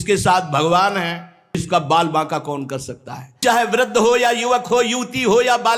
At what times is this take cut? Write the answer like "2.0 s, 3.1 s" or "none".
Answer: 1.6 s, 3.4 s

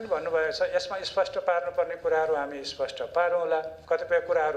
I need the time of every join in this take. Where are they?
none

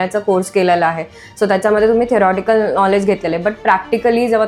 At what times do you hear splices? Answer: none

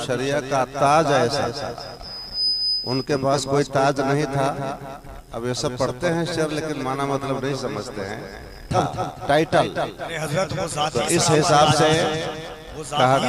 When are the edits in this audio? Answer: 8.7 s

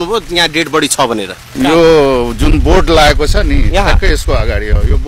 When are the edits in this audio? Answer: 1.4 s

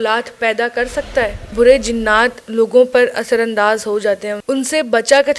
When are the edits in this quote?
1.5 s, 4.3 s

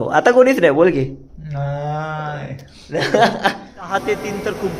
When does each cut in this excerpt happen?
3.9 s

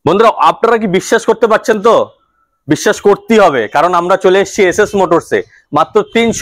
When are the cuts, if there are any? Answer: none

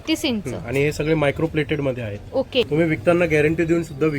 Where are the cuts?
2.7 s

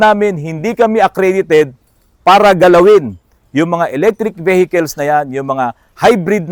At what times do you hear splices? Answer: none

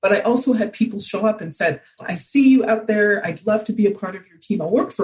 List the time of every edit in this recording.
2.0 s

